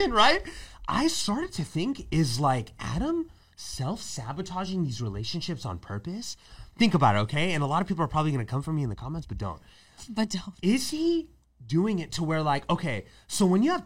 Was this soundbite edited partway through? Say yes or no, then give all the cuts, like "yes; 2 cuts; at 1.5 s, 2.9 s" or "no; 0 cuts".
no; 0 cuts